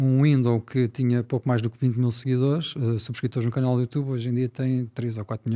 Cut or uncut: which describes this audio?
uncut